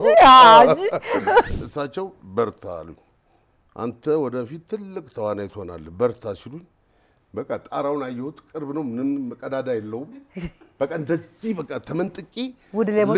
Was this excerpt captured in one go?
no; 1 cut; at 1.5 s

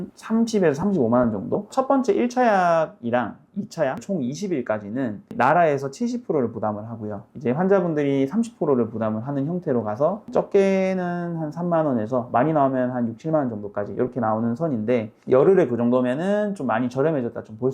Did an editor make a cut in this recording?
yes; 2 cuts; at 1.7 s, 10.2 s

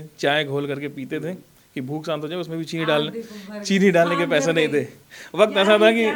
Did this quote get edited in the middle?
no; 0 cuts

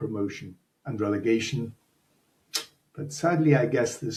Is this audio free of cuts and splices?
yes; 0 cuts

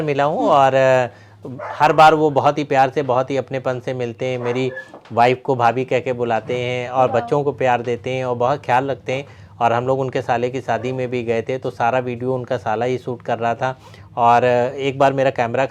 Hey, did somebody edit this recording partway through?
no; 0 cuts

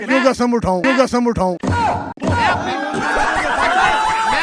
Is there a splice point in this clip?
yes; 1 cut; at 2.1 s

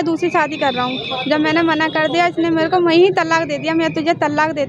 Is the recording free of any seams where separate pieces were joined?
yes; 0 cuts

